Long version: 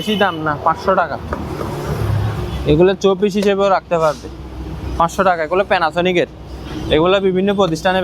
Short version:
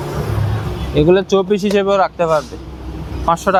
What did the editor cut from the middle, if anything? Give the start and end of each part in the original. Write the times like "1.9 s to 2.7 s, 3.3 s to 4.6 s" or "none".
none